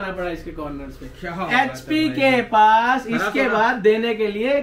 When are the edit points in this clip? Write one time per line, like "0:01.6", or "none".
none

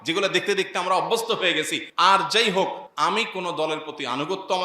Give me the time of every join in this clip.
0:01.8
0:02.8

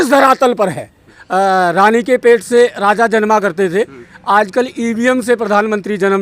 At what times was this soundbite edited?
0:01.1

